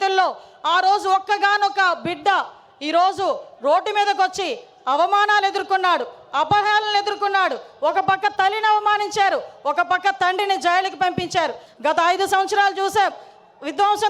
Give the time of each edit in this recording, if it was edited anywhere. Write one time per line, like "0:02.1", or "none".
0:11.7